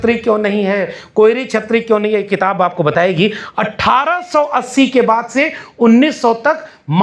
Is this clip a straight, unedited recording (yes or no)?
yes